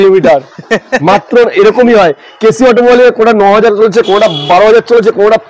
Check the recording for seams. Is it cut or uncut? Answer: uncut